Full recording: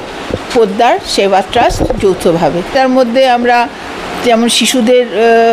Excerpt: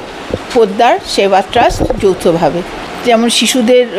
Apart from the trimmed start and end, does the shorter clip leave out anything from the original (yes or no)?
yes